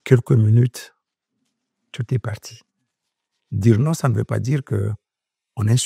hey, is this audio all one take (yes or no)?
no